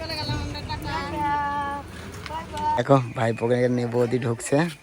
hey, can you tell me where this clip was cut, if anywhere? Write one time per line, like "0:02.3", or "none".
0:02.8